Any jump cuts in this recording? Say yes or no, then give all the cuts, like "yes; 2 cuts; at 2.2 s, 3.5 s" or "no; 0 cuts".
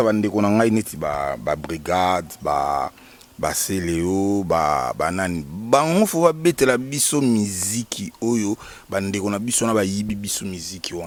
no; 0 cuts